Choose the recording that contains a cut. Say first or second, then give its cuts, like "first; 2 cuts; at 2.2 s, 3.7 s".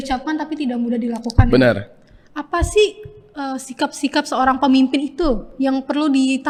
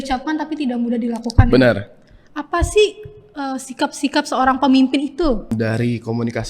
second; 1 cut; at 5.5 s